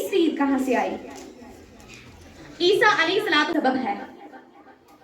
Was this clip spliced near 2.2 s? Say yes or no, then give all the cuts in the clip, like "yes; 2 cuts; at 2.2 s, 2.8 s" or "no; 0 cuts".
no; 1 cut; at 3.5 s